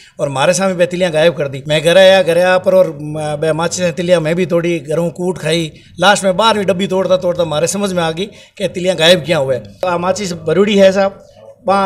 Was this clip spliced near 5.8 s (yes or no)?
no